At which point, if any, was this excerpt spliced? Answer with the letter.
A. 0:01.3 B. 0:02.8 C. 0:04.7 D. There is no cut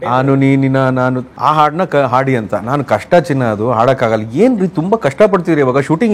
A